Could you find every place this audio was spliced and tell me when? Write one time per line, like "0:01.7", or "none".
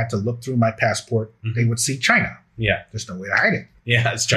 none